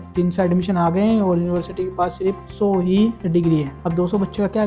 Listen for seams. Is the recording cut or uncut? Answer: uncut